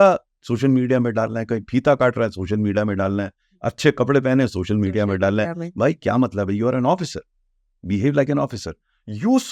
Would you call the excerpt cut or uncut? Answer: uncut